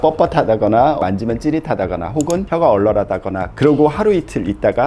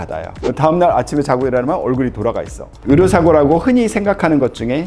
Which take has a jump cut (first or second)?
first